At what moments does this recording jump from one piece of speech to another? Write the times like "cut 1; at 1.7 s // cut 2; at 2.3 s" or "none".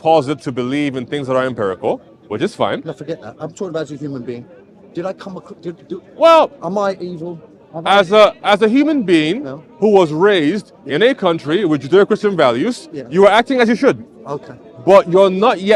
none